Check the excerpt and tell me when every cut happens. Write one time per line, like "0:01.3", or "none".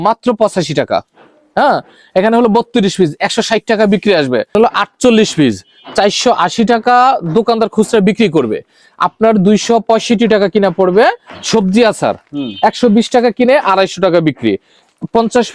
0:04.5
0:11.3